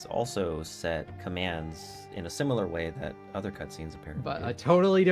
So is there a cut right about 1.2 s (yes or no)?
yes